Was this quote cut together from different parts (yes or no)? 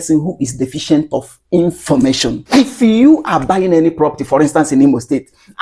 yes